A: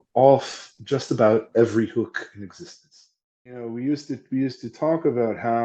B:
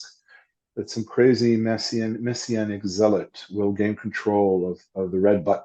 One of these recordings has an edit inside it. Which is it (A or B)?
A